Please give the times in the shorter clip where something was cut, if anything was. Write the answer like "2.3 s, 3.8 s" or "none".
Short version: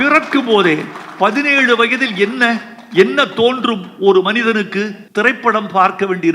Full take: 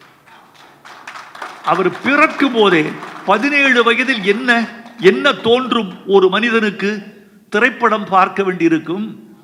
5.0 s